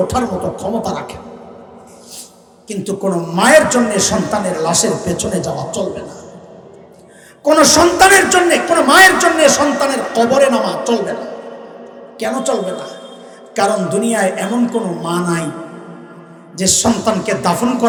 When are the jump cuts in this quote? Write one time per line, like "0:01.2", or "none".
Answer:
none